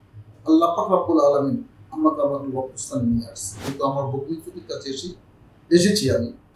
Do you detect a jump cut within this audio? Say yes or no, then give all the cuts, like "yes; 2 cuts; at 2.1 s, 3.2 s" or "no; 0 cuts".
yes; 1 cut; at 3.5 s